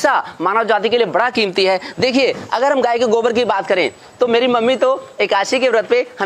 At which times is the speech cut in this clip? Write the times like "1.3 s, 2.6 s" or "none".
1.9 s